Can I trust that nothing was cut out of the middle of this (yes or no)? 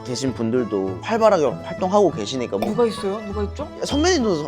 no